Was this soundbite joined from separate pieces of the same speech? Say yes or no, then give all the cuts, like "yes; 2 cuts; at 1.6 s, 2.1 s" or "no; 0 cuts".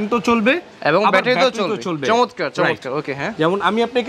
no; 0 cuts